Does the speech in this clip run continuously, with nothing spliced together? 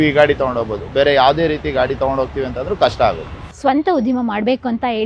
no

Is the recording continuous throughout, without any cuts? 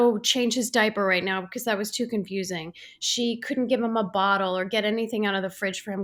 yes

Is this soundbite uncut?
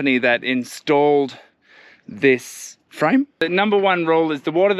no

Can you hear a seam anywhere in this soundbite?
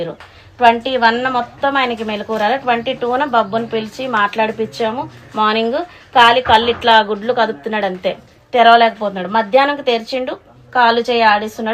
no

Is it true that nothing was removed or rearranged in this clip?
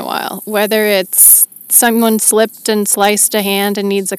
yes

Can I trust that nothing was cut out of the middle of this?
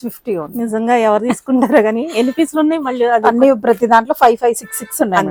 yes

